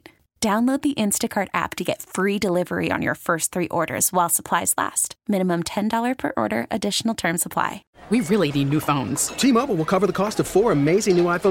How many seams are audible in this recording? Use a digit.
1